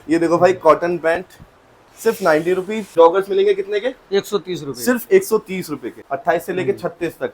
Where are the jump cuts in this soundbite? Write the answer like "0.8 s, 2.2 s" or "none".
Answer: 2.9 s, 6.1 s